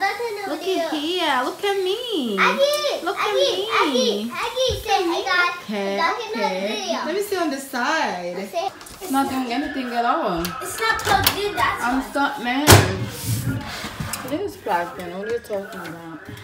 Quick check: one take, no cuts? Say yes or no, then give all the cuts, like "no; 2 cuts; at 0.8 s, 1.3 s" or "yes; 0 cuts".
no; 1 cut; at 8.7 s